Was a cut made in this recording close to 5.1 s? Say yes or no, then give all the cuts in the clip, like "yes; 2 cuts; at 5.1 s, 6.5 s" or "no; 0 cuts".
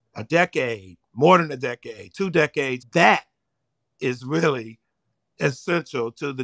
no; 1 cut; at 2.8 s